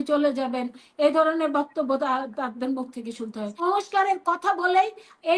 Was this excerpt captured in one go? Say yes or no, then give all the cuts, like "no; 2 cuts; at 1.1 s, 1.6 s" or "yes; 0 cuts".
no; 1 cut; at 3.6 s